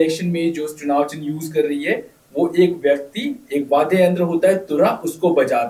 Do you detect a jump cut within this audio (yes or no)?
no